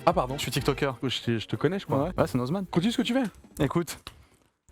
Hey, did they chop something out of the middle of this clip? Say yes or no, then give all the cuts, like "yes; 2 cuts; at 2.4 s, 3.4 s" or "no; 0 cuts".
yes; 2 cuts; at 1.0 s, 2.7 s